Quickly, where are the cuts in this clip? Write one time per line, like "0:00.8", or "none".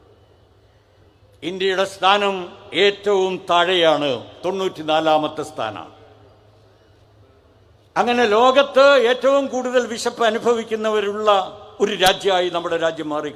none